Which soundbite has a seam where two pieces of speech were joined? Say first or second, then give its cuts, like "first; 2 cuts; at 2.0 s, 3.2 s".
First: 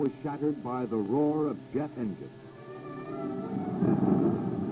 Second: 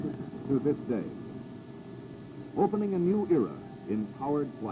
first; 1 cut; at 1.0 s